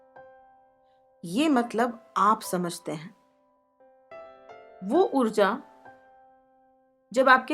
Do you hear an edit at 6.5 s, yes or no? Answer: no